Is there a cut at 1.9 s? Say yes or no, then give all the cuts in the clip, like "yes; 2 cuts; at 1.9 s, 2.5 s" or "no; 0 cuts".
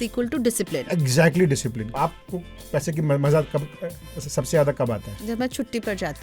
yes; 1 cut; at 1.9 s